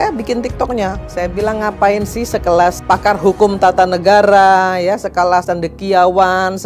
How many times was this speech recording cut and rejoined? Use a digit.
3